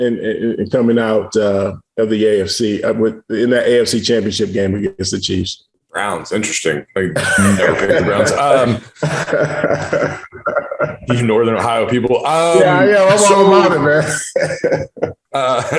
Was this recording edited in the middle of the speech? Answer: no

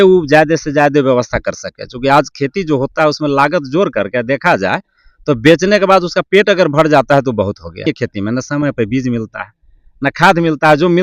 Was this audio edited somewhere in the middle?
yes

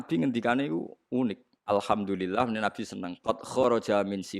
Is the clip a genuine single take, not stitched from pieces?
no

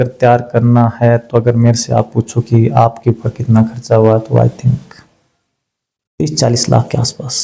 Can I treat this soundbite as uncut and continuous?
yes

